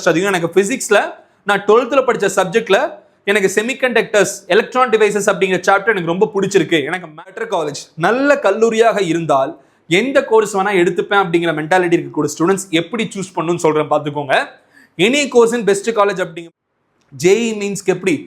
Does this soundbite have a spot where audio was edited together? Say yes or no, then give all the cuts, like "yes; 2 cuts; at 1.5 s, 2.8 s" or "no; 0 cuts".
yes; 2 cuts; at 7.3 s, 16.3 s